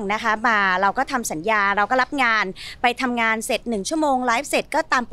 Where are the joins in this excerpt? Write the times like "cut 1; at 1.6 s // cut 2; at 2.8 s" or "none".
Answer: none